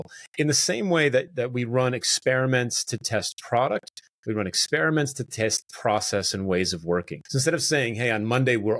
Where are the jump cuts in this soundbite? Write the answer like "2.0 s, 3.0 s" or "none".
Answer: 1.3 s, 7.2 s